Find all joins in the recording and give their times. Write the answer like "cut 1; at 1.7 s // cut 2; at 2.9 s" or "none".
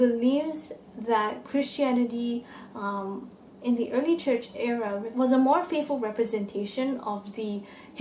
cut 1; at 5.1 s